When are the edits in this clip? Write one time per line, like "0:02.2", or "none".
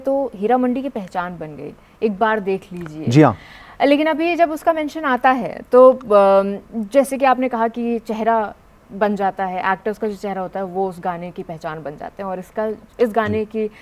none

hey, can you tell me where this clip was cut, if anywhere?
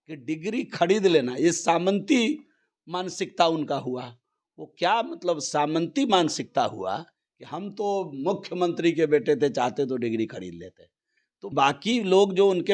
0:11.5

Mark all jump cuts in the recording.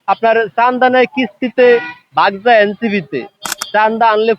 none

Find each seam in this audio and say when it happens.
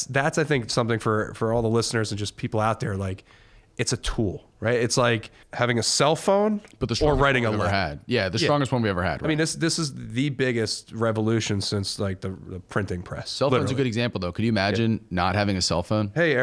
0:05.4

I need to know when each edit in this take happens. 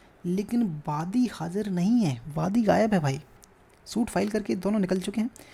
none

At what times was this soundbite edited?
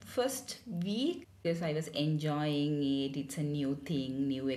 0:01.4

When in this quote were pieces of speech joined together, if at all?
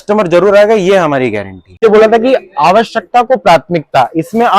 0:01.8

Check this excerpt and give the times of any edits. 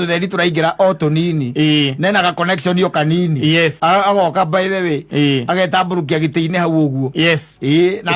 0:03.8

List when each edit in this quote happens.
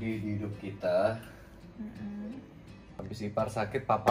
0:03.0

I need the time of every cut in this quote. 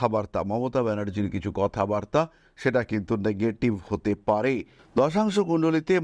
0:04.8

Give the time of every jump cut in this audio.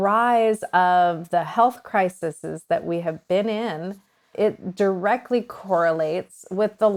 none

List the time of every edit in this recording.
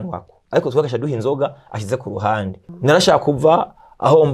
0:02.6

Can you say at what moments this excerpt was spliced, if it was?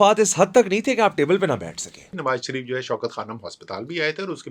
0:02.1

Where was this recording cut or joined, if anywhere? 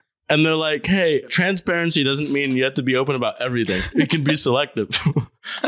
0:01.3
0:03.8

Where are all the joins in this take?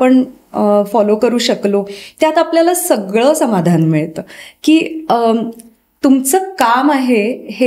none

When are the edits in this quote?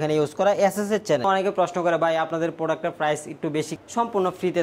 0:01.2
0:03.7

